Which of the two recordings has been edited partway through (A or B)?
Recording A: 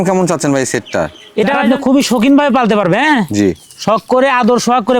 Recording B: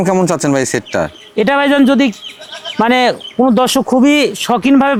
A